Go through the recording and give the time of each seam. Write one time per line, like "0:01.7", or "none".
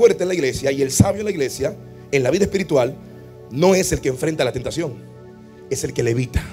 none